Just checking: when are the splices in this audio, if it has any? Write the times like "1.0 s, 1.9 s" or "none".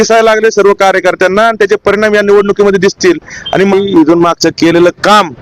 3.7 s

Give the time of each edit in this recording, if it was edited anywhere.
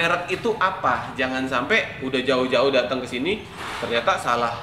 none

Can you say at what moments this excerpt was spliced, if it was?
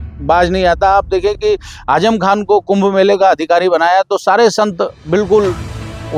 none

